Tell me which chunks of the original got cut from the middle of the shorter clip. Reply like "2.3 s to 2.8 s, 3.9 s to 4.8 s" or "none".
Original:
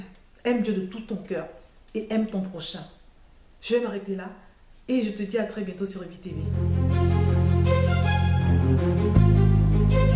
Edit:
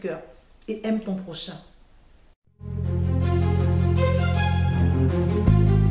3.6 s to 6.0 s